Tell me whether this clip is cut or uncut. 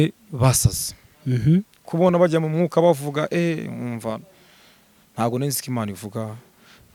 uncut